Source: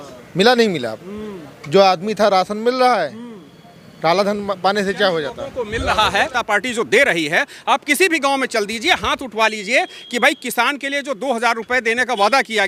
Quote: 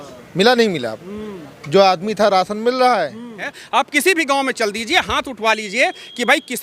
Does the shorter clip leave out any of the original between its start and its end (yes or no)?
yes